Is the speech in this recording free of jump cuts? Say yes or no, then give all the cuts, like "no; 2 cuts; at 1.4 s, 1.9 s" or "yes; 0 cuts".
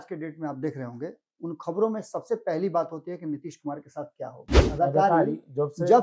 no; 1 cut; at 4.5 s